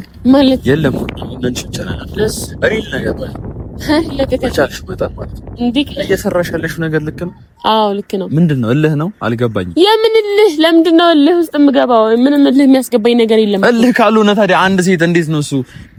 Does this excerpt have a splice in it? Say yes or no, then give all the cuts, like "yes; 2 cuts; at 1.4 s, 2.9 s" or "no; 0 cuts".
no; 0 cuts